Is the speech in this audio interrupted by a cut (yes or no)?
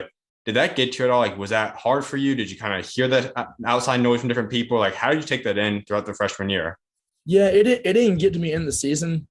no